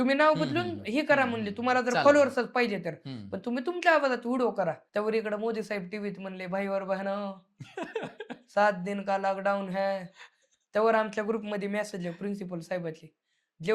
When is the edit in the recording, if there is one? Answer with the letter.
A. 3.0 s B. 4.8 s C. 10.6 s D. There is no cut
B